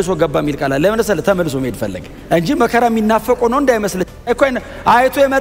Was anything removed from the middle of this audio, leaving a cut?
no; 0 cuts

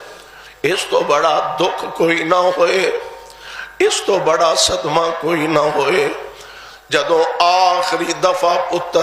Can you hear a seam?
no; 0 cuts

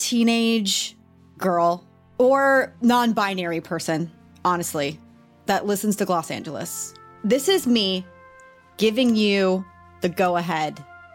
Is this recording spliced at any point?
no; 0 cuts

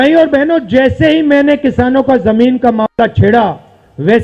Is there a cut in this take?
no; 0 cuts

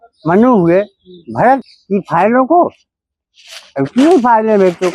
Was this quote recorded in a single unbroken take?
no; 1 cut; at 1.7 s

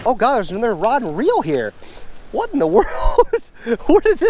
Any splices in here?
no; 0 cuts

